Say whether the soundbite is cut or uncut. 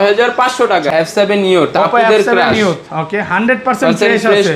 cut